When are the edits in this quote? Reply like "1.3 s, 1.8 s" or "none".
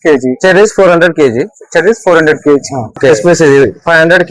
3.0 s

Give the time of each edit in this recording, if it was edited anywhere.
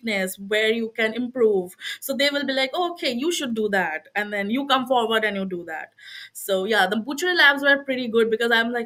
none

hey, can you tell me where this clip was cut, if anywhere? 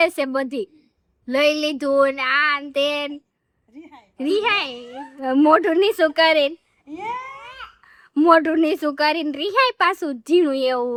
none

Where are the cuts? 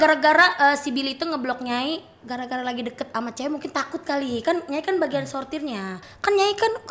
6.0 s

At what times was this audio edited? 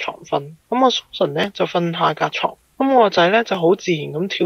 none

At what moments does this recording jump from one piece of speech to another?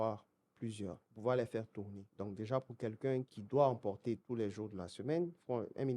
1.1 s, 2.1 s, 3.4 s, 4.2 s

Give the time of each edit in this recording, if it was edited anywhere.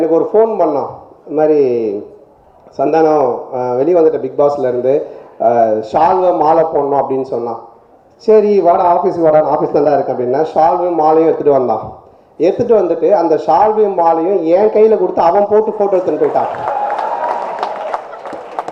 none

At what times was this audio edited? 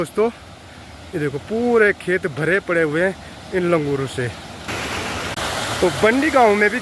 5.0 s

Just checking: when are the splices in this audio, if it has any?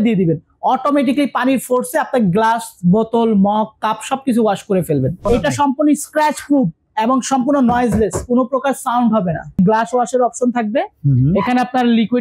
5.2 s, 9.6 s

